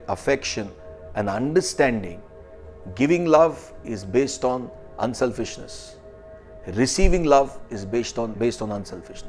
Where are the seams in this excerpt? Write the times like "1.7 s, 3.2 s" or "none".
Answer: 2.6 s